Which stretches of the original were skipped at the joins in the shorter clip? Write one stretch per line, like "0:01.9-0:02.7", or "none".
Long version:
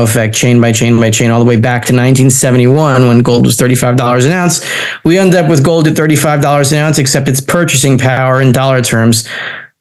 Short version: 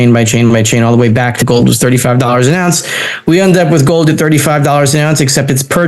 0:01.9-0:03.2